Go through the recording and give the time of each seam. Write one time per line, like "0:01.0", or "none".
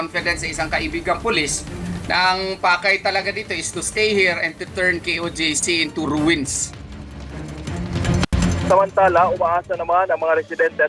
none

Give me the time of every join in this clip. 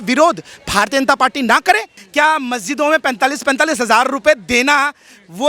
0:02.0

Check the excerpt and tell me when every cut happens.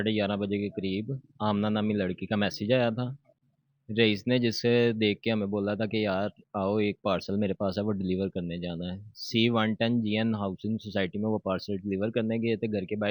none

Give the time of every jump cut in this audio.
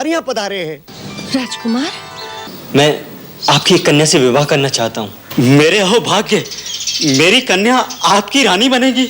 0:02.5

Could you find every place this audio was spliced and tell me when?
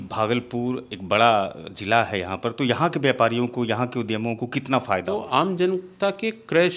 0:05.1

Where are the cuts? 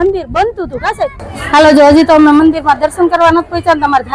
0:01.2

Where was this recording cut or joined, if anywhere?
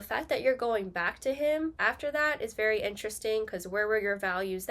0:01.8

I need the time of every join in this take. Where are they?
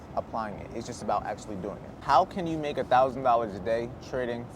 0:02.0

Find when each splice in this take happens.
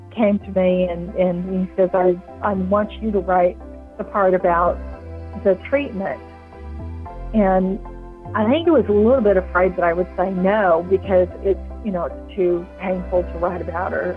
0:02.3

